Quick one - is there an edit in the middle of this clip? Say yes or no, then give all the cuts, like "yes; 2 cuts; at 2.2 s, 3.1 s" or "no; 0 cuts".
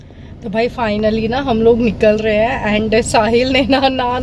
no; 0 cuts